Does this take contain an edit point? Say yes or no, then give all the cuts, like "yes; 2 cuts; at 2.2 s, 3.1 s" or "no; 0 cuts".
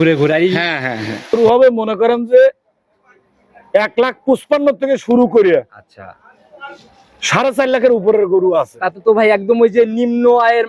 yes; 1 cut; at 1.3 s